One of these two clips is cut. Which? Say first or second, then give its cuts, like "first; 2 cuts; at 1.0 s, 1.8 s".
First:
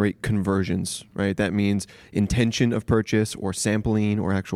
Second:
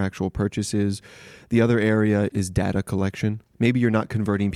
second; 2 cuts; at 2.3 s, 3.4 s